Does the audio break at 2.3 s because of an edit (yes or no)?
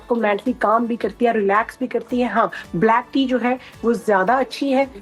no